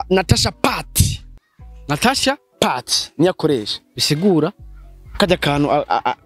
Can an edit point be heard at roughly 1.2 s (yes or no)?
no